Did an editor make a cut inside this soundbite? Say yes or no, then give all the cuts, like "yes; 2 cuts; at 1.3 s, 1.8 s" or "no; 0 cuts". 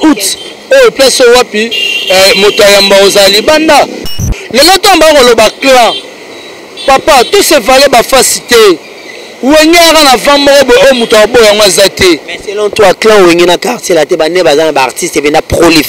yes; 1 cut; at 4.2 s